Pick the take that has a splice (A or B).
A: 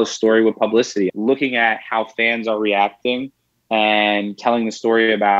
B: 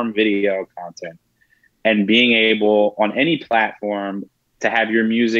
A